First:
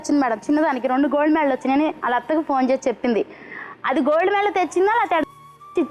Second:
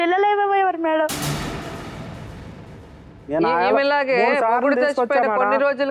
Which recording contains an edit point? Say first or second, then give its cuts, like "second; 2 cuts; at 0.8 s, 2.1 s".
second; 2 cuts; at 1.1 s, 3.1 s